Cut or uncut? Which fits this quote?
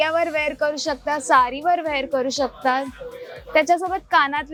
uncut